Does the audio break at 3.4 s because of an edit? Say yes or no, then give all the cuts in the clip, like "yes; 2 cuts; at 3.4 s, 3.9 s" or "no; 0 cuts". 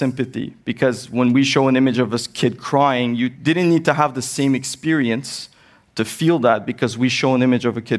yes; 1 cut; at 3.4 s